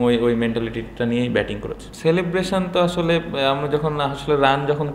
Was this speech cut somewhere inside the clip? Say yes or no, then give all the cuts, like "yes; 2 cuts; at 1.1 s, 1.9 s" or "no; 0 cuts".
yes; 1 cut; at 1.8 s